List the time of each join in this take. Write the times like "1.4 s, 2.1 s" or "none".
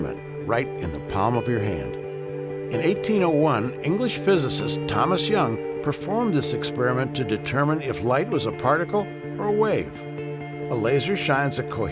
none